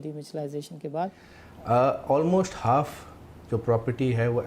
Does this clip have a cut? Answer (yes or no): yes